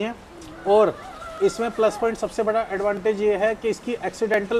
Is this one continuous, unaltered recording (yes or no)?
yes